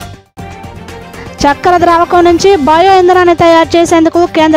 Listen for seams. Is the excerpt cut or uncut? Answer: cut